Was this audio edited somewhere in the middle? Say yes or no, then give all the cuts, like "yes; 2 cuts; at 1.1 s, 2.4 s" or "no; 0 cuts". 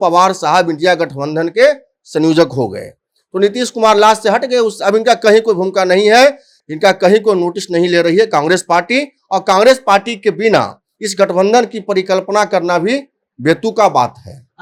no; 0 cuts